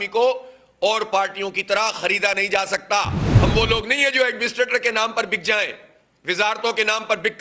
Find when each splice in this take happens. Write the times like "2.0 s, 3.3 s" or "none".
3.2 s